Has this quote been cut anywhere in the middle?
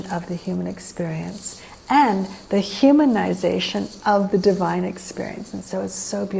no; 0 cuts

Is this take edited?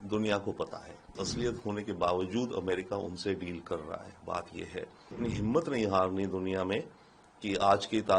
yes; 2 cuts; at 1.2 s, 5.2 s

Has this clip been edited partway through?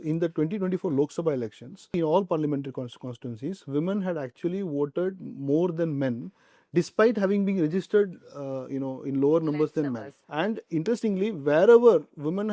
yes; 2 cuts; at 1.9 s, 10.1 s

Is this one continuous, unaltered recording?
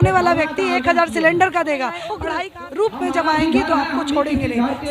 no; 1 cut; at 2.2 s

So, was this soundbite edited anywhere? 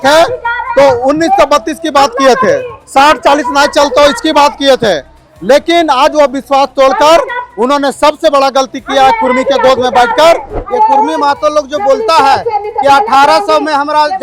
yes; 1 cut; at 10.5 s

